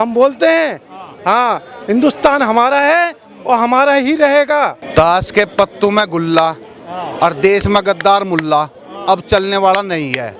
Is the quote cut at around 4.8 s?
yes; 1 cut; at 4.8 s

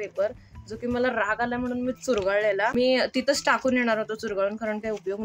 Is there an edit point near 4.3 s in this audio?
no; 1 cut; at 2.7 s

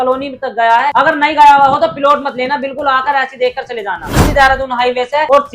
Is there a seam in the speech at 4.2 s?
yes; 1 cut; at 4.2 s

